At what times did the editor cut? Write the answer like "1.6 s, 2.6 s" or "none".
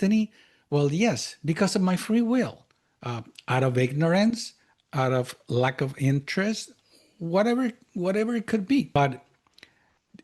9.0 s